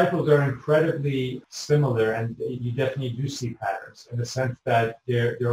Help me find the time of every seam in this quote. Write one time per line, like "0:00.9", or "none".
0:01.4